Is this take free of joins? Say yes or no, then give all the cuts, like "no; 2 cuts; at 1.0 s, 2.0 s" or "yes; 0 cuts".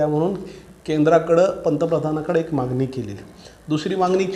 yes; 0 cuts